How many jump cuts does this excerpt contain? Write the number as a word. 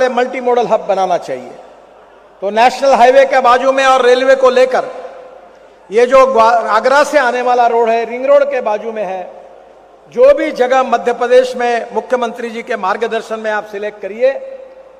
zero